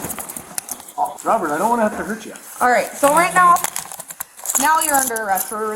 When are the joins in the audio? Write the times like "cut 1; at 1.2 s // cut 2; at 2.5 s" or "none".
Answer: cut 1; at 1.1 s